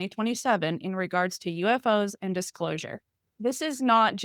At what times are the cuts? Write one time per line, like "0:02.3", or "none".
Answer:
0:03.3